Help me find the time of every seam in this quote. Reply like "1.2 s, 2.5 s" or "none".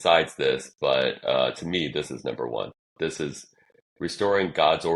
none